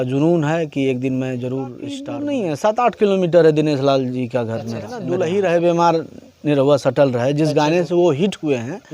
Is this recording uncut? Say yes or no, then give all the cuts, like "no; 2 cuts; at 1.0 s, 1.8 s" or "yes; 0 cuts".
no; 2 cuts; at 2.1 s, 5.0 s